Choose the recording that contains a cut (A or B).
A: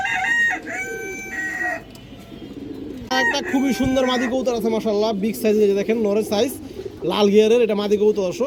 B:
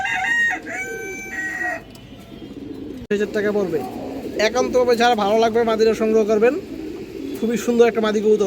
B